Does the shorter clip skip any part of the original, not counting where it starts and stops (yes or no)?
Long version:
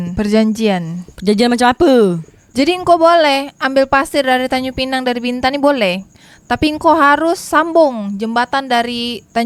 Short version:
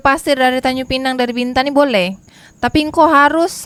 no